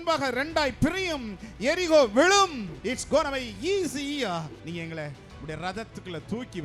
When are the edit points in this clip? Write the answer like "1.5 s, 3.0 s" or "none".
2.7 s, 4.6 s